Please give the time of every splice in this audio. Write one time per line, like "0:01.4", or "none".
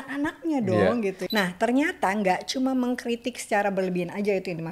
0:01.2